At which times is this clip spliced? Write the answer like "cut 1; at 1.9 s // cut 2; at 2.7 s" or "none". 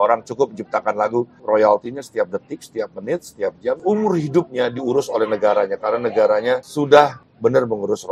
cut 1; at 1.3 s // cut 2; at 3.8 s // cut 3; at 6.7 s // cut 4; at 7.2 s